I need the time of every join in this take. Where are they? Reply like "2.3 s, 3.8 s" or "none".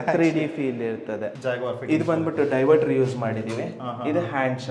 1.3 s